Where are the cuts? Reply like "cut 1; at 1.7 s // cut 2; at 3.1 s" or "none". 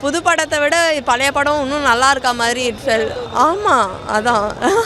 none

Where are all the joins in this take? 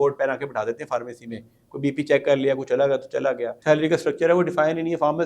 cut 1; at 3.5 s

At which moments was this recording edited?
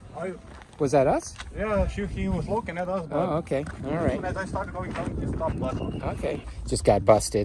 cut 1; at 6.5 s

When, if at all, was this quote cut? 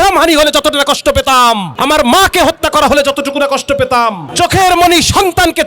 cut 1; at 1.7 s // cut 2; at 4.2 s

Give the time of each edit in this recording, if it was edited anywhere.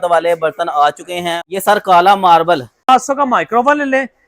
cut 1; at 1.4 s // cut 2; at 2.9 s

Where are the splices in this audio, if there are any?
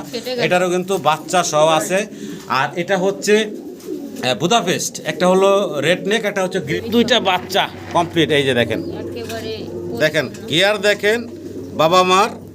cut 1; at 6.7 s

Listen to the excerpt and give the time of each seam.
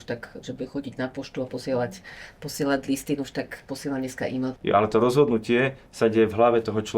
cut 1; at 4.5 s

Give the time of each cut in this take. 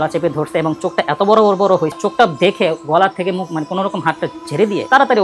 cut 1; at 2.0 s

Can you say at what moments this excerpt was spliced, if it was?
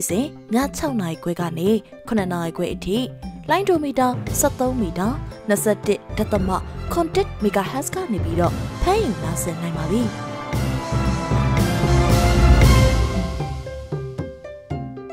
cut 1; at 10.2 s

